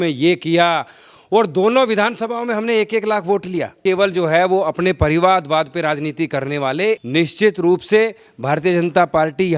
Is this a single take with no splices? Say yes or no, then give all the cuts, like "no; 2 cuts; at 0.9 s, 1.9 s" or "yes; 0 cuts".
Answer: no; 2 cuts; at 3.8 s, 7.0 s